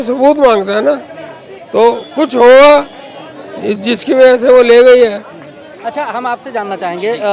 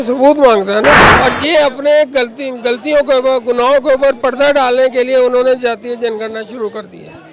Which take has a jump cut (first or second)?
second